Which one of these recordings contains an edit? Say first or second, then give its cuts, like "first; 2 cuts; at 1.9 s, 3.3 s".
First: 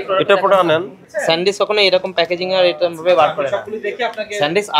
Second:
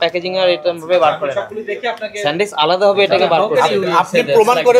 first; 1 cut; at 1.1 s